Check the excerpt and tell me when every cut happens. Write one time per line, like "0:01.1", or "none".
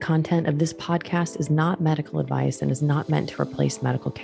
none